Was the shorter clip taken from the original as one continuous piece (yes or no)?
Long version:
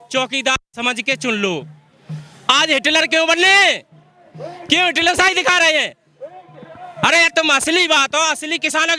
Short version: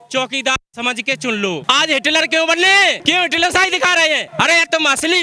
no